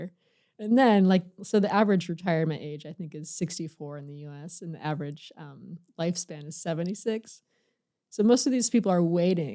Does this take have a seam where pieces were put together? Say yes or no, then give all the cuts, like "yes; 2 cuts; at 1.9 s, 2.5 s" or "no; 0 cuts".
no; 0 cuts